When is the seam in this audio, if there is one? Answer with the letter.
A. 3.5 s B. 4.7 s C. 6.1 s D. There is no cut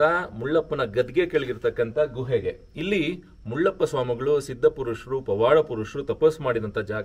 D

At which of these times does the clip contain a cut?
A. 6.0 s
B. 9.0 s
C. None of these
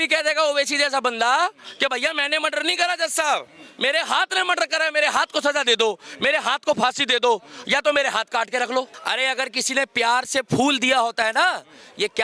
B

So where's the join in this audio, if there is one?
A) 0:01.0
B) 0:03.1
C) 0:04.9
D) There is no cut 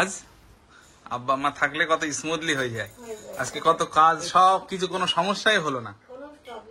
D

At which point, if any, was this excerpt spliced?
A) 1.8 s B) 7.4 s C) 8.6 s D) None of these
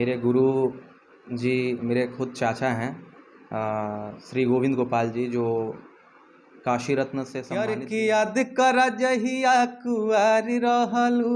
B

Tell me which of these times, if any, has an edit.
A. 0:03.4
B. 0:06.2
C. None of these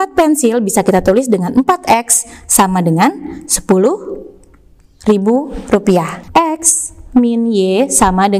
B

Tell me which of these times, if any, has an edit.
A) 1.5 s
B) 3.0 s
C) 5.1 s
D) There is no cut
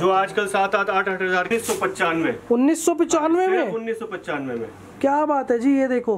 A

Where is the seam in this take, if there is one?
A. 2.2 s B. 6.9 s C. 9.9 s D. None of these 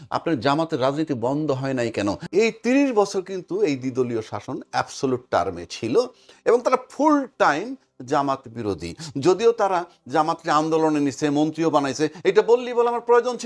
A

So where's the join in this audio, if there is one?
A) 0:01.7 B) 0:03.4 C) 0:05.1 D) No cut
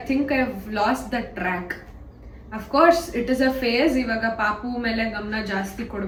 D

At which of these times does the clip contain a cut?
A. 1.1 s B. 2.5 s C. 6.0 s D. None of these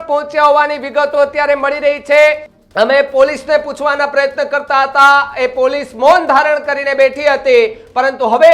B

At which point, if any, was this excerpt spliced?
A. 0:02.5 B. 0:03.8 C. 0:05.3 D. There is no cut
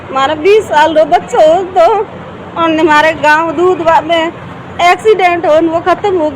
D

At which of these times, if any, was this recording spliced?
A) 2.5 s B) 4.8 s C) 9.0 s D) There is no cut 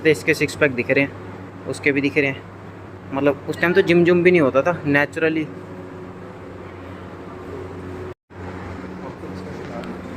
D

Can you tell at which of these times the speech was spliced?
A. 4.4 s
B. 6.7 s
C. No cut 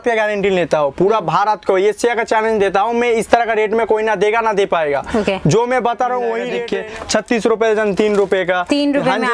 B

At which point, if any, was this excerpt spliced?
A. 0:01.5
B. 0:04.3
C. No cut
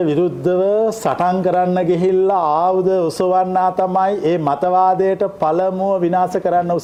C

